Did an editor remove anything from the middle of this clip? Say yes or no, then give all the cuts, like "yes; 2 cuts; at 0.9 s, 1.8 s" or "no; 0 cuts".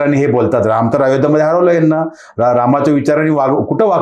no; 0 cuts